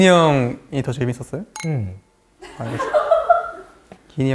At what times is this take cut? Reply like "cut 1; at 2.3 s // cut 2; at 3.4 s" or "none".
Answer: none